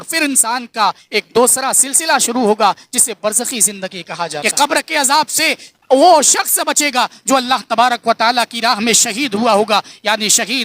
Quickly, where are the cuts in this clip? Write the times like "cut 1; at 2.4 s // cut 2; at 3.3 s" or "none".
cut 1; at 4.4 s